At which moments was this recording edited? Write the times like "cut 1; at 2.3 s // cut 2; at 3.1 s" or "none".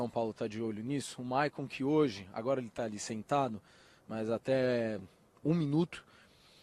none